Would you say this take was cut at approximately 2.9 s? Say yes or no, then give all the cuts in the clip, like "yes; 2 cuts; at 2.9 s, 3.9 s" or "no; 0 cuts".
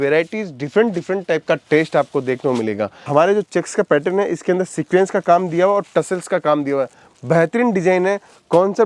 yes; 1 cut; at 2.9 s